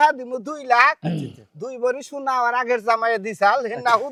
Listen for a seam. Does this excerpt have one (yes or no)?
no